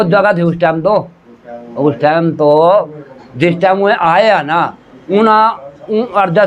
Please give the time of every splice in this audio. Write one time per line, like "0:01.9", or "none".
none